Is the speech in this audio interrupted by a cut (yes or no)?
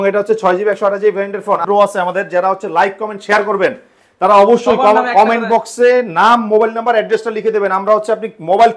yes